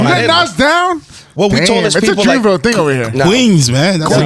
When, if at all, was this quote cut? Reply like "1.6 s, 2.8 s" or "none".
none

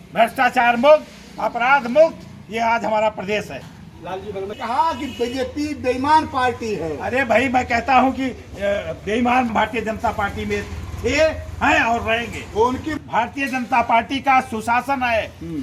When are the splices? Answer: 4.5 s, 9.5 s, 12.9 s

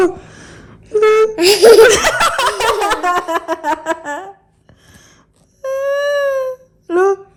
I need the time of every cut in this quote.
none

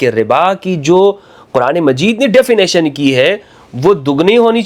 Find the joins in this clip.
none

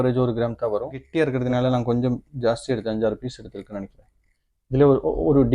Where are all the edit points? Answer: 1.0 s

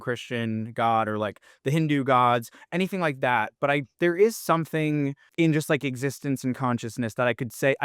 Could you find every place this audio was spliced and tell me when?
5.2 s

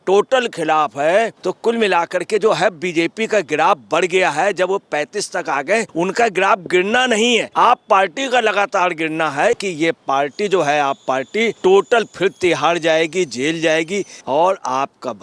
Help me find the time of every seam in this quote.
1.4 s, 5.9 s, 7.5 s, 9.6 s, 11.5 s, 14.1 s

